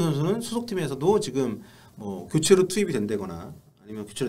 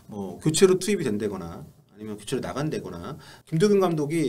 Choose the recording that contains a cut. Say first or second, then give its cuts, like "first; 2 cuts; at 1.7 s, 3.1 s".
second; 1 cut; at 3.3 s